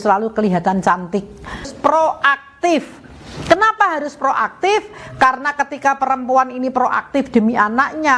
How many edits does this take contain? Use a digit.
1